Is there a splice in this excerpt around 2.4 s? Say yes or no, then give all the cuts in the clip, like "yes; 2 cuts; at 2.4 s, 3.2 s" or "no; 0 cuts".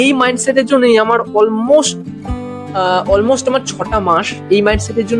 no; 0 cuts